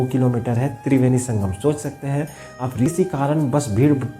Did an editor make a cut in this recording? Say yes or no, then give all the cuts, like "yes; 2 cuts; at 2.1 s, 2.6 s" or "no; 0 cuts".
yes; 1 cut; at 2.9 s